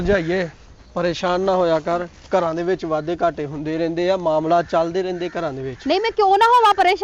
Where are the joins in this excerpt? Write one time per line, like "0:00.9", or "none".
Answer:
none

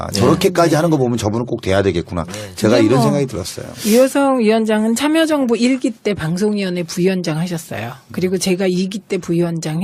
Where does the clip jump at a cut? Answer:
0:01.8

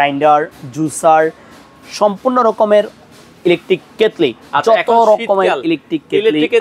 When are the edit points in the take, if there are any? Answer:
none

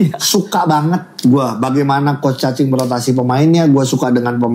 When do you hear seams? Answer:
none

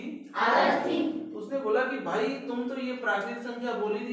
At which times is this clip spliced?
none

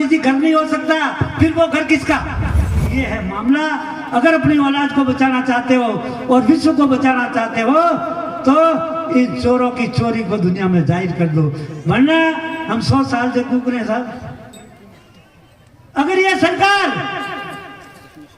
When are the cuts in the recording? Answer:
0:02.9

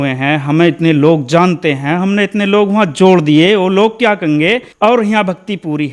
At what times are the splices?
0:04.7

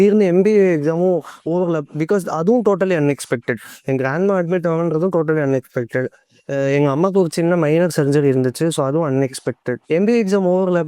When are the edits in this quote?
0:09.7

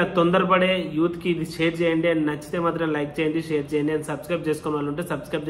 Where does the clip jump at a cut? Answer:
none

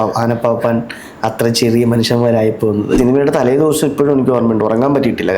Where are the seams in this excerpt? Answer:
0:03.0

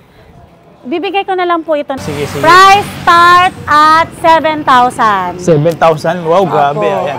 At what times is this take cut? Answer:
0:02.0

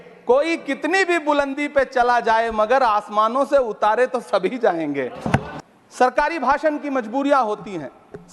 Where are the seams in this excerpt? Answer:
0:05.5

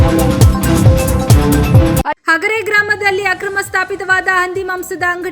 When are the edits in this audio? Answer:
none

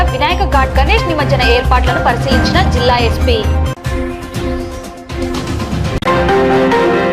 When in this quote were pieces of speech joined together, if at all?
0:05.9

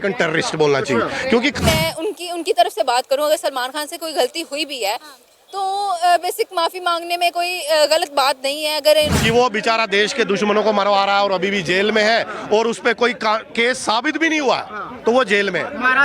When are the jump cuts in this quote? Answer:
0:01.6
0:09.1

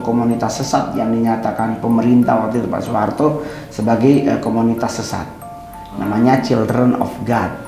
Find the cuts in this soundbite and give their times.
none

